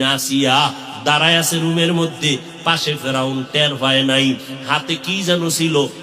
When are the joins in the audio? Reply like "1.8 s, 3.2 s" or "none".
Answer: none